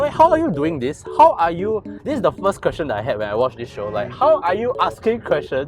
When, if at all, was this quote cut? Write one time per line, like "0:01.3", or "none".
none